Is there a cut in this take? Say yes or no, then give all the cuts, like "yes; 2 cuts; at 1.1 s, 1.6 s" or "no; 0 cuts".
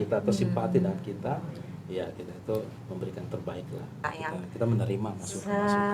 yes; 1 cut; at 4.1 s